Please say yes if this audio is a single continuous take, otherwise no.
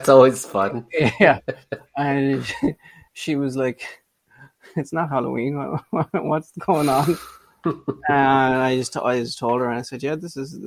yes